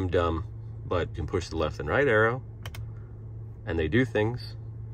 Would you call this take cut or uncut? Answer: cut